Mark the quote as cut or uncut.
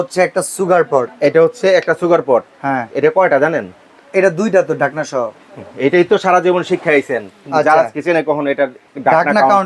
uncut